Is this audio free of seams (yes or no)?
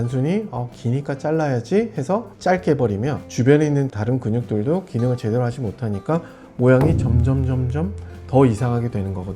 no